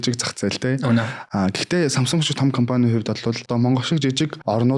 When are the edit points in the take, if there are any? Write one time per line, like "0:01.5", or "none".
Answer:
0:01.3
0:03.5

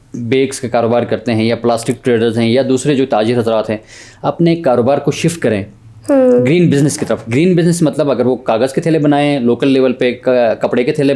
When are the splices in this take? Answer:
none

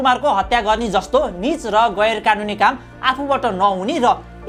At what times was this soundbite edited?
none

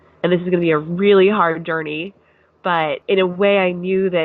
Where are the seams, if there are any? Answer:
0:03.0

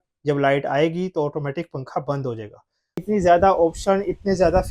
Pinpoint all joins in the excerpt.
0:03.0

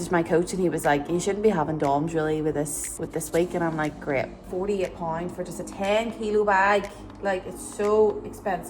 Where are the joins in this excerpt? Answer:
0:04.3

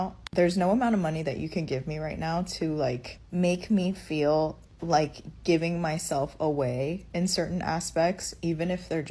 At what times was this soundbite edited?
0:07.0

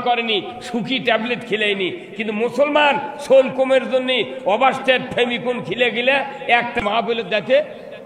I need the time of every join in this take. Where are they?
0:06.8

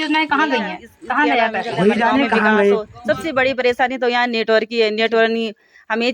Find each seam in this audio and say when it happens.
0:02.9

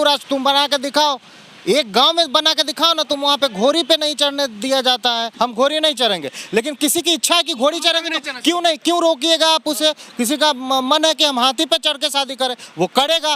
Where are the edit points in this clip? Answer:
0:05.3

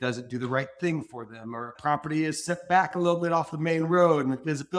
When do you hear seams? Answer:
0:01.8

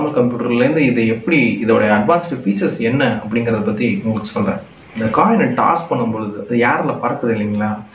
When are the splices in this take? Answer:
0:04.9

